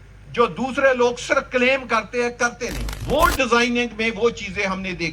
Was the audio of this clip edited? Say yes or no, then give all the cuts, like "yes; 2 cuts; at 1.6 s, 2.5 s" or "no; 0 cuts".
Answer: yes; 1 cut; at 2.9 s